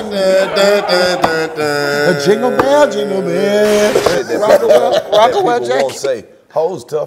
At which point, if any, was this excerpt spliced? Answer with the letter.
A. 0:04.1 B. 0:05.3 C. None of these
A